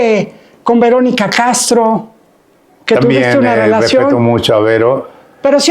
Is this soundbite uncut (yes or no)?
yes